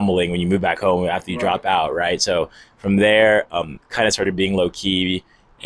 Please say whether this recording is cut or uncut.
uncut